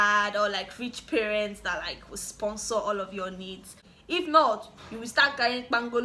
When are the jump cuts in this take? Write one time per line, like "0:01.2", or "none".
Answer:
0:03.9